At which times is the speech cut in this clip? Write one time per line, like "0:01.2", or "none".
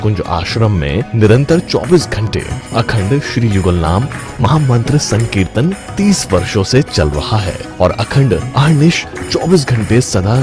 0:04.5